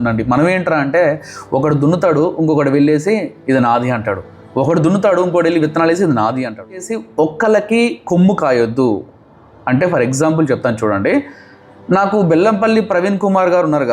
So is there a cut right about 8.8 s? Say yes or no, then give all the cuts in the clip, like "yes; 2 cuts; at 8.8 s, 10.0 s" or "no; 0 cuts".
no; 1 cut; at 6.9 s